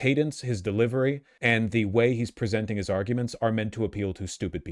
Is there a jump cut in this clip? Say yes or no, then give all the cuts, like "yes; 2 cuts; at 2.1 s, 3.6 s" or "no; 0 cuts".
yes; 1 cut; at 1.3 s